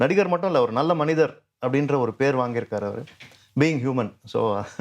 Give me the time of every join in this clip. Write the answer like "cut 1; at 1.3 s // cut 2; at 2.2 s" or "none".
none

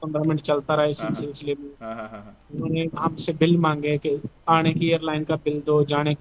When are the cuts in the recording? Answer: none

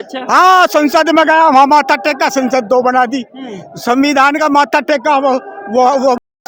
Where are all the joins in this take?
none

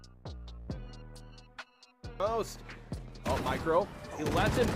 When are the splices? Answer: none

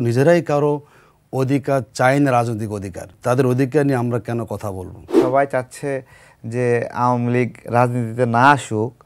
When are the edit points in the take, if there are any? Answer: cut 1; at 3.1 s // cut 2; at 5.1 s

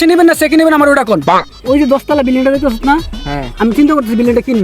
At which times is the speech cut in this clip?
cut 1; at 1.3 s

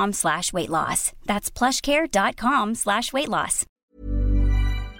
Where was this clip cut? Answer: cut 1; at 3.9 s

